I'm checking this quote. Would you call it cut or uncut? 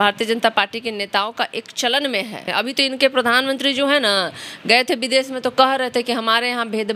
cut